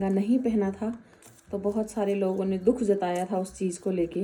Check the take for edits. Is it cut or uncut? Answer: uncut